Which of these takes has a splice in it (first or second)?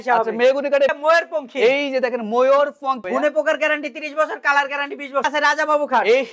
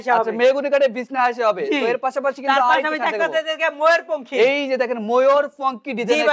first